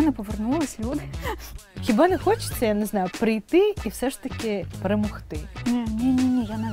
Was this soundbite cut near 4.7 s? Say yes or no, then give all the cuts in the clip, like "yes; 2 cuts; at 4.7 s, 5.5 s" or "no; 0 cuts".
yes; 3 cuts; at 1.7 s, 4.7 s, 5.5 s